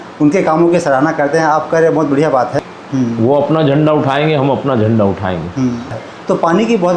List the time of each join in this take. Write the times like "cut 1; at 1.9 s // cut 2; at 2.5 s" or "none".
cut 1; at 2.6 s // cut 2; at 6.1 s